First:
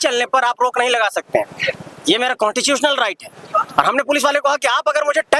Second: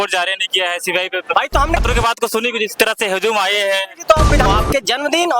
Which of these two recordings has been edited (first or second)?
second